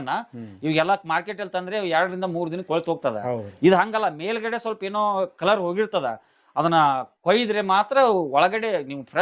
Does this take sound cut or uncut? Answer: uncut